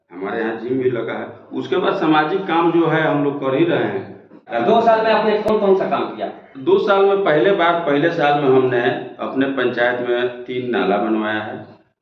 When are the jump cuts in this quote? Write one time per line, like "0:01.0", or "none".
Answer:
0:04.5
0:05.5